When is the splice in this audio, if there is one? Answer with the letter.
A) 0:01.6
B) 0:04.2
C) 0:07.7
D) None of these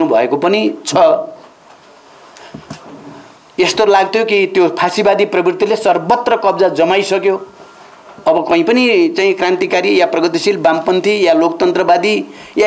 D